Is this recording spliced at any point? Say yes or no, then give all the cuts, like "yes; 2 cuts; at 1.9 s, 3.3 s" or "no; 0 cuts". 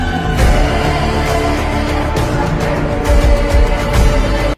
no; 0 cuts